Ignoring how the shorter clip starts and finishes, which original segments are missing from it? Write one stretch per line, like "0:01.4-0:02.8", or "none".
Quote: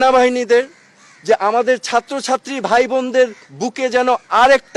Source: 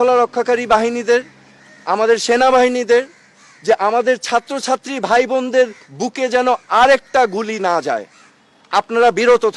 none